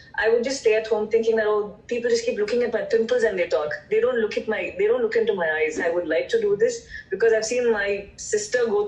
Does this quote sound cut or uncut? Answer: cut